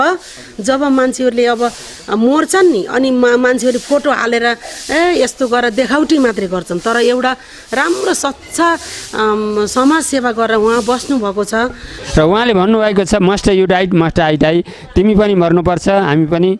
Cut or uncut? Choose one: cut